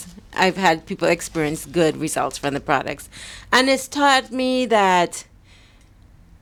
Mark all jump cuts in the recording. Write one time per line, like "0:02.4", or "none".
none